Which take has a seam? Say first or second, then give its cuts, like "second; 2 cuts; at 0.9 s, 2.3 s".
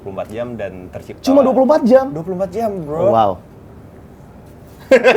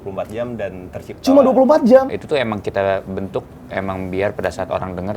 second; 1 cut; at 2.2 s